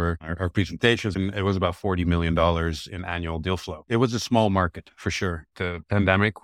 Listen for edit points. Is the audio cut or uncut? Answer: cut